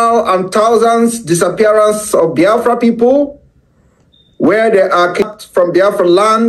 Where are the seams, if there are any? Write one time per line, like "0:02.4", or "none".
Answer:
0:05.3